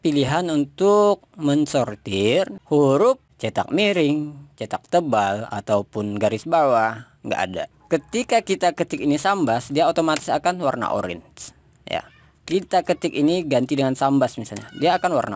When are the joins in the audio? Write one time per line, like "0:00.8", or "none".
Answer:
0:02.6
0:03.3
0:07.7